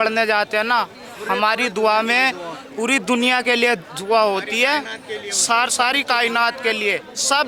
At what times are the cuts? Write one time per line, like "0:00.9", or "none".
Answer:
none